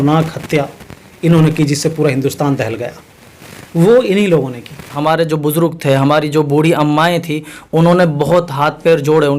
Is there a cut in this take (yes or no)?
yes